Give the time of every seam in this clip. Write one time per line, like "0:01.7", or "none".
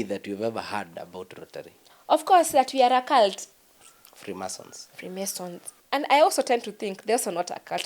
0:03.4
0:05.7